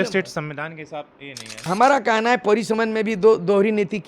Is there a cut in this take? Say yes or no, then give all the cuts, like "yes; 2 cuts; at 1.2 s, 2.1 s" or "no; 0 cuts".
yes; 1 cut; at 1.7 s